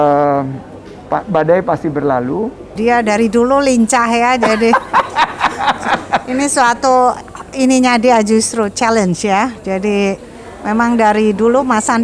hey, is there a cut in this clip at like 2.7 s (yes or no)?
yes